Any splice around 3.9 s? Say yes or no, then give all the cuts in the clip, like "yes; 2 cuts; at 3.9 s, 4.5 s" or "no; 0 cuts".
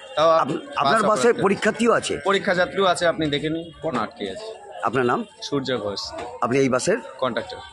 yes; 1 cut; at 3.9 s